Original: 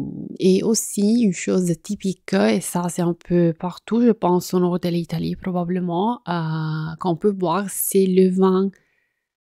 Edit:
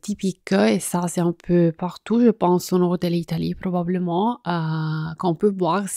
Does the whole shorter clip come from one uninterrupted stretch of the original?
yes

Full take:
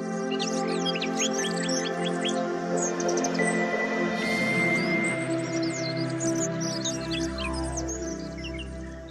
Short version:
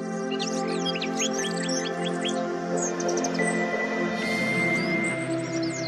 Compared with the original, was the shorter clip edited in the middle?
no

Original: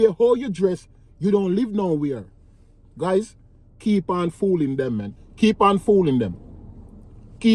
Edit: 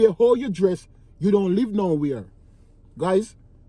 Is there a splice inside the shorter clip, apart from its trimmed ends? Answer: no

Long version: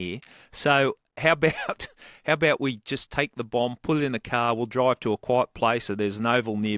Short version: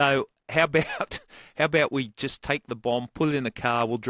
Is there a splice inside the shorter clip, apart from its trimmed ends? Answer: no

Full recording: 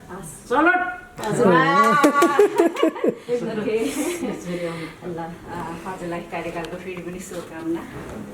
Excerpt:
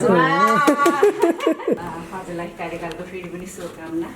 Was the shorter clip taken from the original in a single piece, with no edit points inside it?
no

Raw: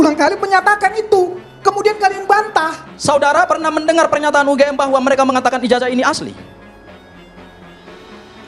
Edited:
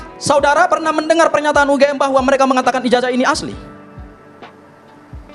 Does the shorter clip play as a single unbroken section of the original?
yes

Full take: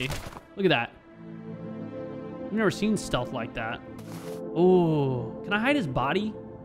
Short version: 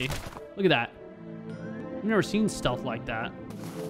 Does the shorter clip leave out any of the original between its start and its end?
yes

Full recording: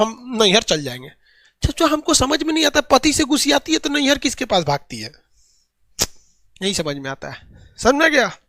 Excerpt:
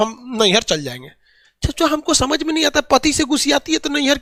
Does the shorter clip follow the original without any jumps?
yes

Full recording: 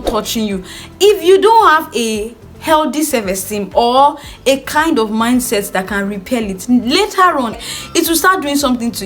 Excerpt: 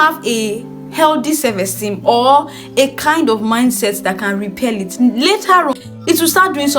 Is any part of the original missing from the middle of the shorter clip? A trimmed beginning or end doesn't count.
yes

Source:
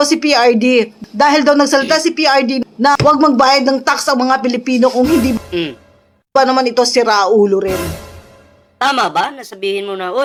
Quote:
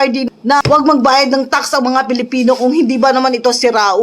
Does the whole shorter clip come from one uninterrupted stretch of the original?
no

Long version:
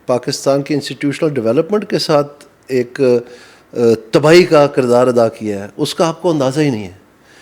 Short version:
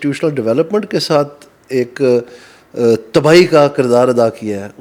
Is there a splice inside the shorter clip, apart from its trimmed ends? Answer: no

